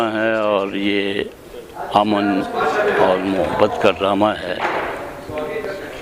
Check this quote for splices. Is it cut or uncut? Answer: uncut